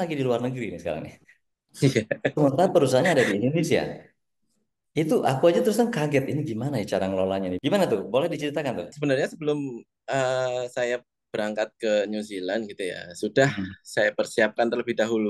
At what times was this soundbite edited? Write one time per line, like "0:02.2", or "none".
0:07.5
0:08.9

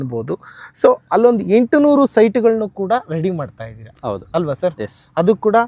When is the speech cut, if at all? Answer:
none

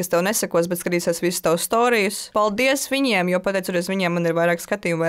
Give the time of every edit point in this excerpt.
0:02.3

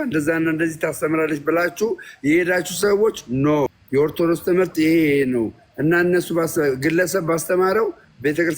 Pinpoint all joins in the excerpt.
none

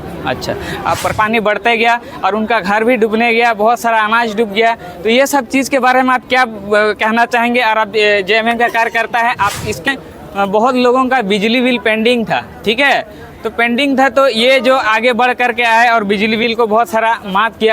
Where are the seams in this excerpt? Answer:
0:01.1
0:09.9

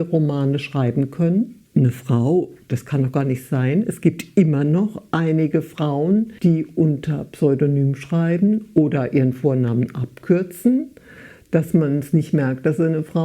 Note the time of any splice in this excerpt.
0:01.6
0:06.3

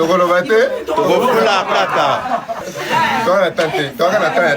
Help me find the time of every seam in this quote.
0:02.7

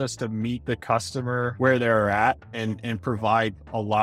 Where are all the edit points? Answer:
0:01.5

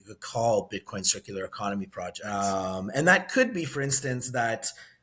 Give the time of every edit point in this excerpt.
0:02.2

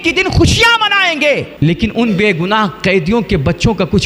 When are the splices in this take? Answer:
0:01.5

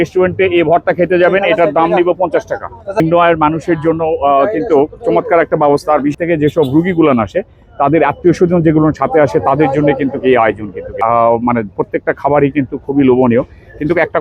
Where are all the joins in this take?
0:03.0
0:06.2
0:10.9

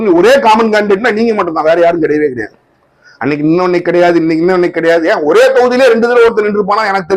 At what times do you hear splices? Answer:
none

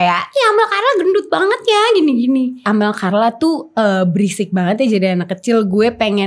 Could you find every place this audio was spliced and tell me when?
0:02.6

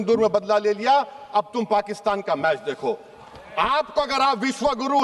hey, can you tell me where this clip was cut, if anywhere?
0:03.1

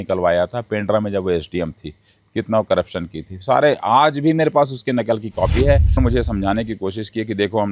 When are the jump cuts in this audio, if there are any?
0:06.0

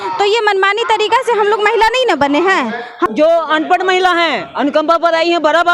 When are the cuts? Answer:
0:03.1

